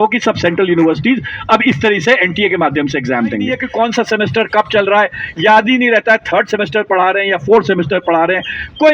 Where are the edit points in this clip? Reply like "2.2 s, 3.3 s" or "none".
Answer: 3.6 s